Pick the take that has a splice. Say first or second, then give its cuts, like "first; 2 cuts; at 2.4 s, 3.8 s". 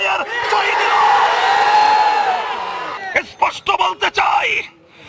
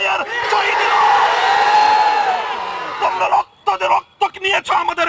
first; 1 cut; at 2.9 s